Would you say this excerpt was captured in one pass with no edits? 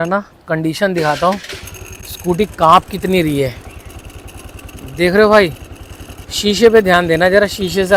yes; 0 cuts

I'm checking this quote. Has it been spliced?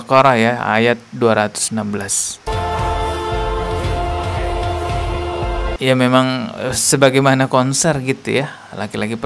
yes; 1 cut; at 5.7 s

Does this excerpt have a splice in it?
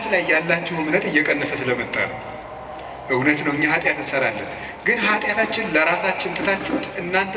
no; 0 cuts

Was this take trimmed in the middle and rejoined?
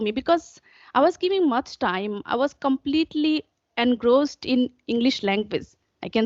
no; 0 cuts

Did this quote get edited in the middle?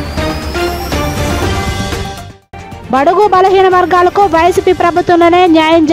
no; 0 cuts

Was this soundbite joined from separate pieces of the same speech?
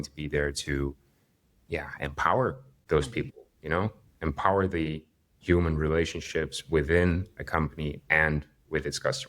yes; 1 cut; at 2.7 s

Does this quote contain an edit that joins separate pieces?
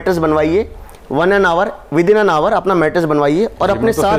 no; 0 cuts

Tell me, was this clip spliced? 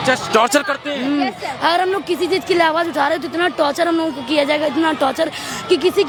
no; 0 cuts

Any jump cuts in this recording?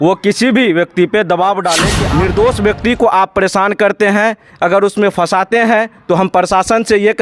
yes; 1 cut; at 1.9 s

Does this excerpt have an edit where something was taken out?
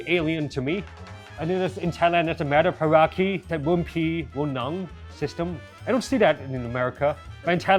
yes; 2 cuts; at 0.9 s, 3.4 s

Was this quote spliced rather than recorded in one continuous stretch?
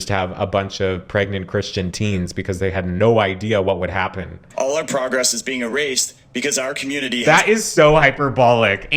yes; 1 cut; at 4.4 s

